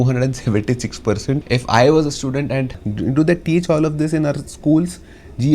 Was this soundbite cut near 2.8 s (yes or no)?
yes